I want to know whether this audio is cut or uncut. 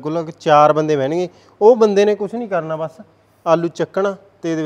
uncut